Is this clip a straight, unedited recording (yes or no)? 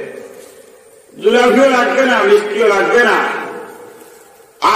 yes